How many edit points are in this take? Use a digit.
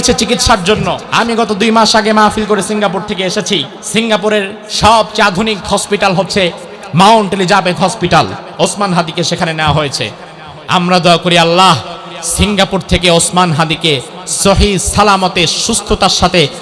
3